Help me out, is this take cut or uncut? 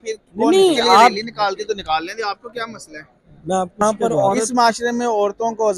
cut